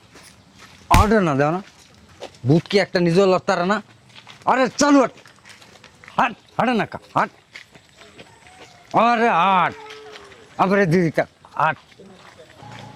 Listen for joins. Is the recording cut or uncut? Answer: uncut